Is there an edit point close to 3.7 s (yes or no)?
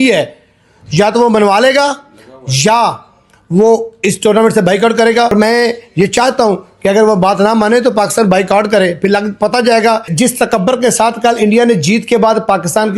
no